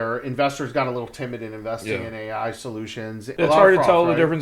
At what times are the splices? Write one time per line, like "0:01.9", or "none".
0:03.2

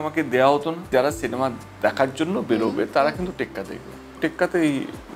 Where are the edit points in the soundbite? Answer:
0:00.9
0:04.2

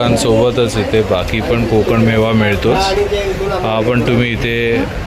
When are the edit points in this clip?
none

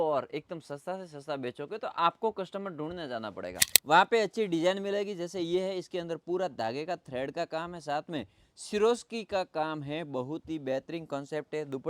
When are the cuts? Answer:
0:03.7

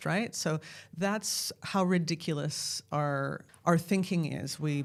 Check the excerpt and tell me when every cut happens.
none

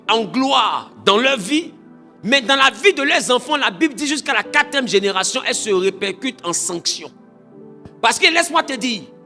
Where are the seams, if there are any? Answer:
none

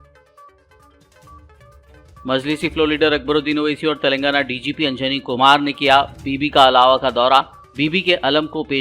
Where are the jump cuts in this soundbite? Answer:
0:01.5

